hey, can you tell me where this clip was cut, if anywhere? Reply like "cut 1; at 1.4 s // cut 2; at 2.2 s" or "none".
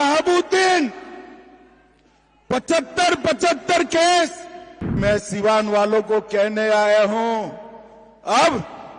cut 1; at 5.0 s

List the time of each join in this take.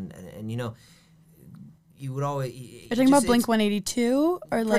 none

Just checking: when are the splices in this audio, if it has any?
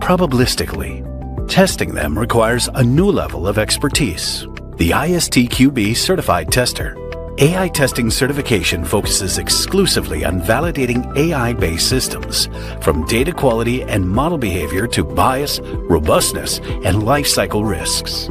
cut 1; at 7.2 s

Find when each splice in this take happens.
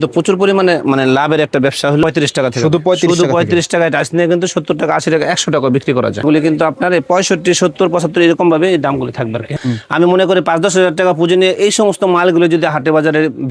cut 1; at 2.0 s // cut 2; at 6.2 s // cut 3; at 9.5 s

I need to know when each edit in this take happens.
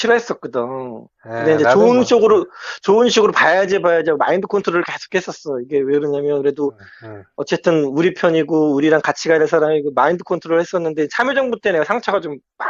none

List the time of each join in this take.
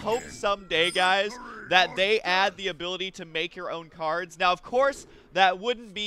cut 1; at 5.1 s

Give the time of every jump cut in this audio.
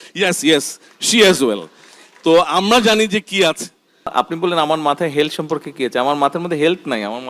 cut 1; at 4.1 s

